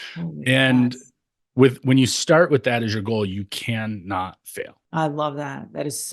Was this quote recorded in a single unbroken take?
no; 1 cut; at 4.8 s

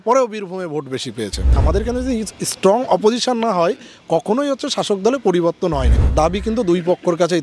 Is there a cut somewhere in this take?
yes; 2 cuts; at 1.6 s, 5.9 s

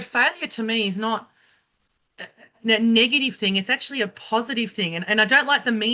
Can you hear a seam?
no; 0 cuts

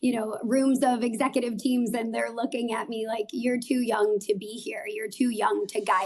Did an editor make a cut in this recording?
no; 0 cuts

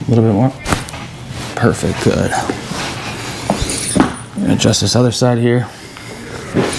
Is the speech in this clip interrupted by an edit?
no; 0 cuts

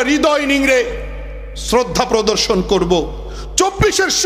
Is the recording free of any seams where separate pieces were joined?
yes; 0 cuts

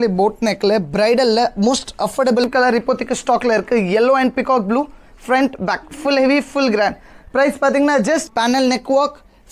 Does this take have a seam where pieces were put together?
yes; 2 cuts; at 2.4 s, 8.3 s

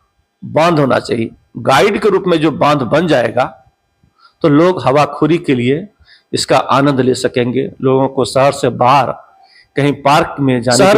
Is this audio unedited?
yes; 0 cuts

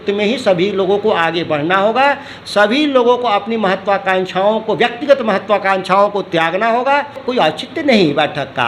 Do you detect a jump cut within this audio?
yes; 1 cut; at 7.2 s

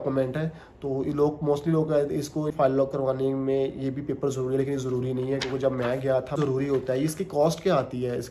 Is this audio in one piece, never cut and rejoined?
no; 2 cuts; at 2.5 s, 6.4 s

